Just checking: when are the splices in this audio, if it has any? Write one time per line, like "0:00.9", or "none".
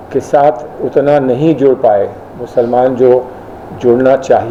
none